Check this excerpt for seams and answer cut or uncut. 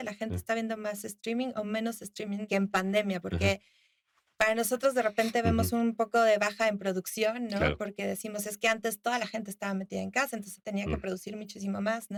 uncut